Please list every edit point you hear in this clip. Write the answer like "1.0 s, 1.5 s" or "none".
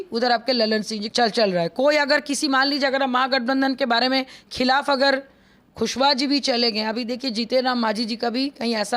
1.1 s, 5.7 s

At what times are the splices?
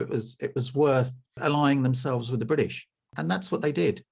1.4 s, 3.1 s

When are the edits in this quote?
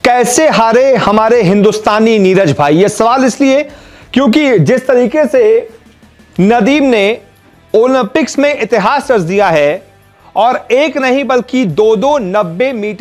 none

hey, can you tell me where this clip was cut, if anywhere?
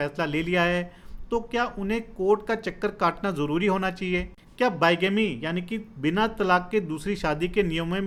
none

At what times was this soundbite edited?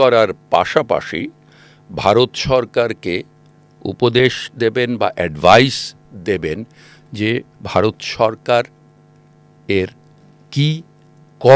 none

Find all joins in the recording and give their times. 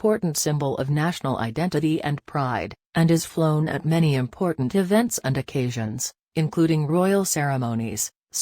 3.3 s

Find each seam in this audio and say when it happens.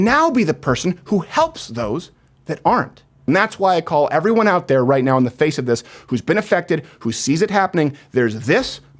3.2 s

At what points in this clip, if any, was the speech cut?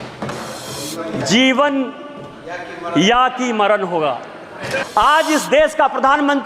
4.7 s

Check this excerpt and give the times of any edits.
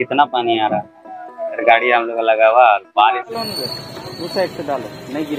3.3 s

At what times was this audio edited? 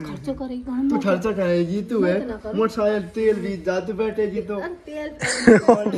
none

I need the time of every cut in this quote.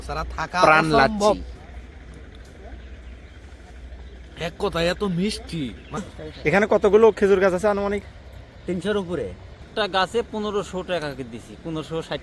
1.6 s, 6.0 s, 9.6 s

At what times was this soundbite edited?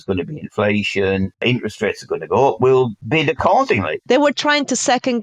1.4 s, 3.0 s, 3.9 s

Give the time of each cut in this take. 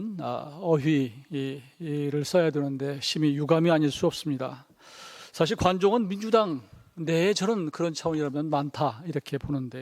none

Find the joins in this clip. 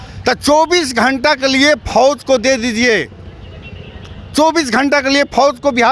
none

